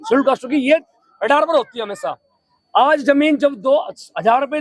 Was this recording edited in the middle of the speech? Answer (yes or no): no